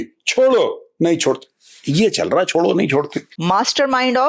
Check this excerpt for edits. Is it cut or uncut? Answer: cut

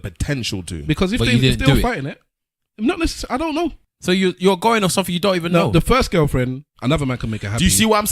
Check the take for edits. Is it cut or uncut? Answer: cut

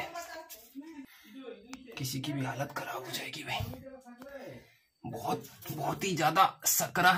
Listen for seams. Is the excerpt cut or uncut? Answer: cut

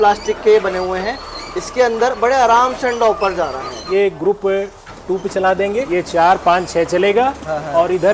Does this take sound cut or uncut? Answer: cut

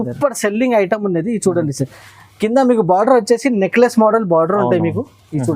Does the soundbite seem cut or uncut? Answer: uncut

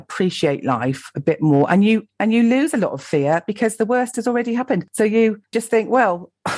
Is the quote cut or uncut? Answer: uncut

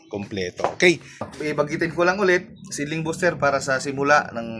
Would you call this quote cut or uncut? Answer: cut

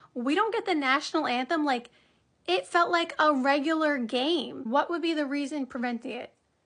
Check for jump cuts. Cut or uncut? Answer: cut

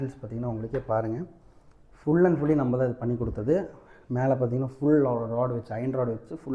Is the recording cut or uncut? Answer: uncut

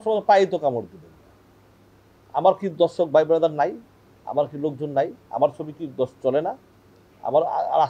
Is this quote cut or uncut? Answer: uncut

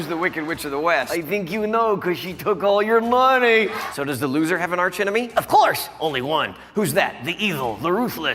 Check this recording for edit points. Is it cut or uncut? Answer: cut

